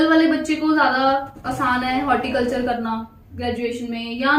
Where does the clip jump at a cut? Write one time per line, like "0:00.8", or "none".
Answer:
none